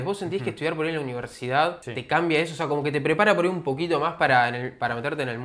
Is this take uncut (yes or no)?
yes